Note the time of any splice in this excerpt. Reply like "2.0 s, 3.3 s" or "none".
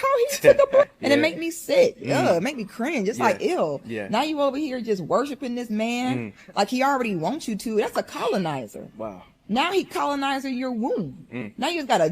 6.4 s